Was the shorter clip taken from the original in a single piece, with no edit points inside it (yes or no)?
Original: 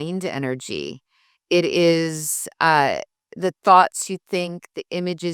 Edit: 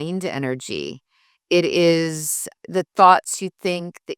no